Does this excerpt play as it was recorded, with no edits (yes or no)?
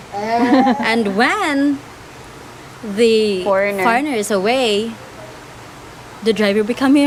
yes